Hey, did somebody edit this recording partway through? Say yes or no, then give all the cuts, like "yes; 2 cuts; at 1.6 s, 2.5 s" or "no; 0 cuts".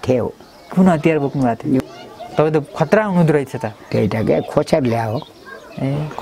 yes; 1 cut; at 1.8 s